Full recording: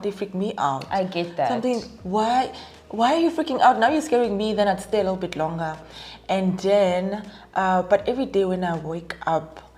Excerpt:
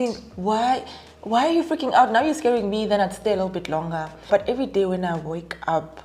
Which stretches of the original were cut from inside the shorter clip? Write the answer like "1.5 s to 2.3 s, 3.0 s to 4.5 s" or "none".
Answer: 5.9 s to 7.9 s